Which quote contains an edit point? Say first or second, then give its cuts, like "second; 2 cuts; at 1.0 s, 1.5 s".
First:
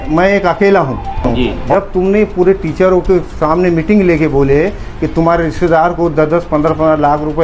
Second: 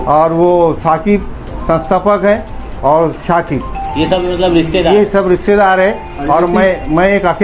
first; 1 cut; at 1.6 s